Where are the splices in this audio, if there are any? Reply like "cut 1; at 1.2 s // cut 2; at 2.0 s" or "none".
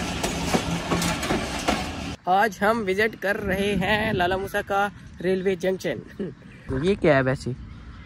cut 1; at 2.1 s // cut 2; at 6.7 s